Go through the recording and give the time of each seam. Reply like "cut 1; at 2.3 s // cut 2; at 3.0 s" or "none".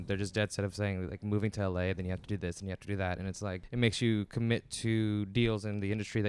cut 1; at 3.6 s